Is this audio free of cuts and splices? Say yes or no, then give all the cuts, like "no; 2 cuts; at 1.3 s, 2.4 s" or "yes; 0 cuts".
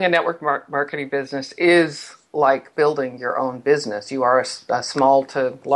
yes; 0 cuts